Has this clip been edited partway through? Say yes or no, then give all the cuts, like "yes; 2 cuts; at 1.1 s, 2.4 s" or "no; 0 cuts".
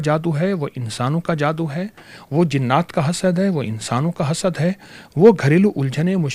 no; 0 cuts